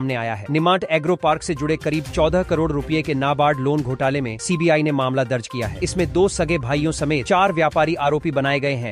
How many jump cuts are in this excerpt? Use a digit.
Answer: 0